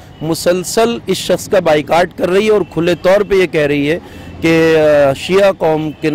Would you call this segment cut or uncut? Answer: uncut